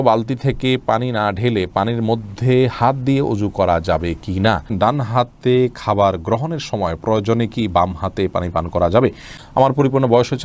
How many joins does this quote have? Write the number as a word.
two